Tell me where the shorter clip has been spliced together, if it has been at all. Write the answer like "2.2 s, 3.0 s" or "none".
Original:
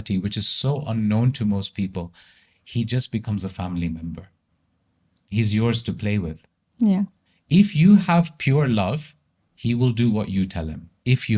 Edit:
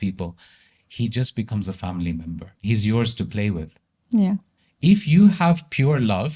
2.5 s